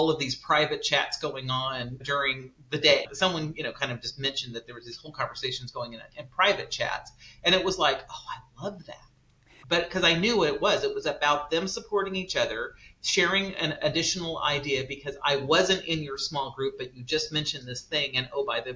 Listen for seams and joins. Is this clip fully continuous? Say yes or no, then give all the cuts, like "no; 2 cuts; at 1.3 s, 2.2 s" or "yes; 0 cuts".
no; 4 cuts; at 2.0 s, 3.1 s, 9.5 s, 13.8 s